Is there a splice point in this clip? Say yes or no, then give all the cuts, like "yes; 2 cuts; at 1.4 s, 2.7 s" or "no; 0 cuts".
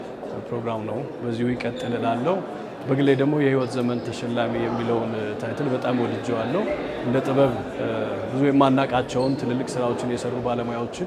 no; 0 cuts